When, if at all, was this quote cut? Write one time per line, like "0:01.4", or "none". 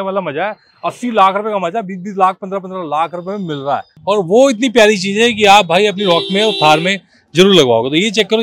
0:03.9